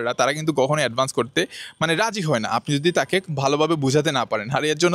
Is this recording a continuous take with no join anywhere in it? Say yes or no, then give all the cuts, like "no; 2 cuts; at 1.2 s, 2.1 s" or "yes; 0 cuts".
yes; 0 cuts